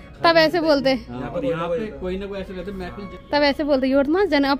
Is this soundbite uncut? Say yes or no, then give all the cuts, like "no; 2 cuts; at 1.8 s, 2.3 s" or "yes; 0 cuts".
no; 1 cut; at 3.1 s